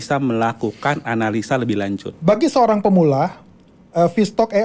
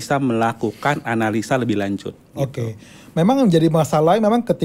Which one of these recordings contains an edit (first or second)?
first